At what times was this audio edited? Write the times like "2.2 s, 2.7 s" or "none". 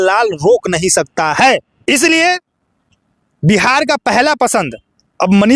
1.7 s